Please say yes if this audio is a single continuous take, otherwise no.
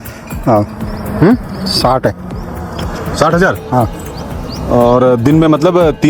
yes